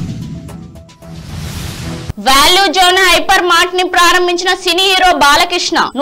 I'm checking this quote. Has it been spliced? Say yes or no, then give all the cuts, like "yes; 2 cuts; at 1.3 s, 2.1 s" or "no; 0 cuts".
yes; 1 cut; at 2.1 s